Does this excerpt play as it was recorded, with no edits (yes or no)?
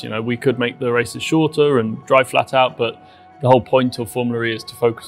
yes